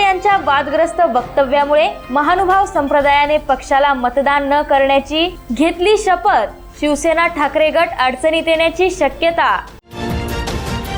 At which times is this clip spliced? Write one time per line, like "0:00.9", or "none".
none